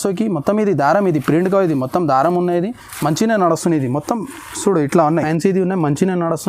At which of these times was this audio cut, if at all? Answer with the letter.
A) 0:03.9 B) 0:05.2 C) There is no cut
B